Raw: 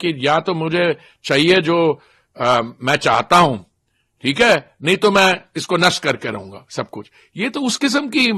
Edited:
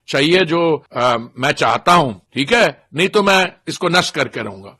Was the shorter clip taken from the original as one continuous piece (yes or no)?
no